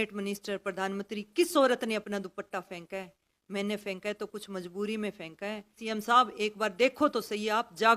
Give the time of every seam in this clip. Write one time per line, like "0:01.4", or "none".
0:05.8